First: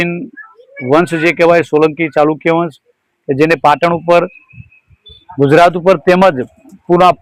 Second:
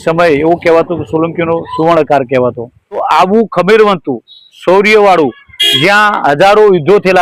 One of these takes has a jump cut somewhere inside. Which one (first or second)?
second